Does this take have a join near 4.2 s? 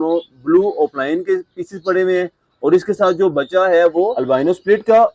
yes; 1 cut; at 4.2 s

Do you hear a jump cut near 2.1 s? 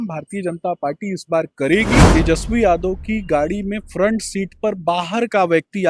yes; 1 cut; at 2.1 s

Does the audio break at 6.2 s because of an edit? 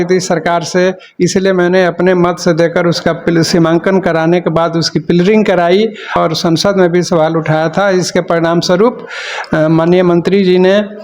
yes; 1 cut; at 6.2 s

